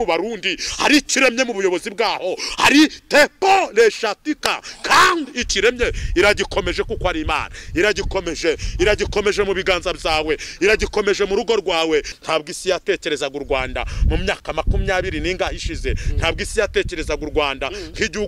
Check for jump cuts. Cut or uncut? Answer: cut